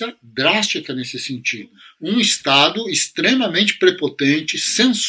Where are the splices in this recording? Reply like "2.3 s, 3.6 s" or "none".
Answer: 1.9 s